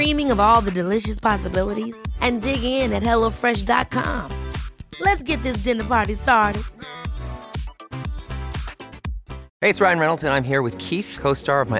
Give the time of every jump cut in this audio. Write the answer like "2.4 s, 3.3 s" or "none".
9.4 s